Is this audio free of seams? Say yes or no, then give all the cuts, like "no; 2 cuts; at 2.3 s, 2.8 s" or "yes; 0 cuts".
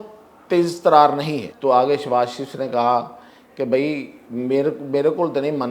no; 1 cut; at 1.4 s